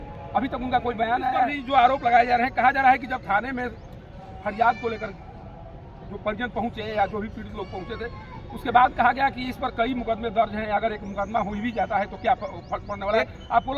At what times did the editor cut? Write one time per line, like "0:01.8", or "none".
0:01.5